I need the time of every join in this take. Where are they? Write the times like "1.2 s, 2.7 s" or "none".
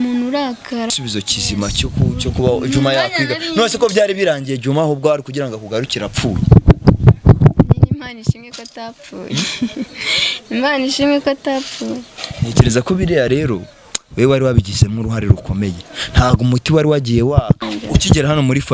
0.9 s, 17.6 s